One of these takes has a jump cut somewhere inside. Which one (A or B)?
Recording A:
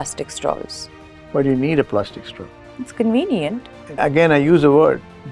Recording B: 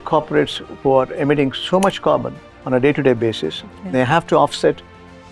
A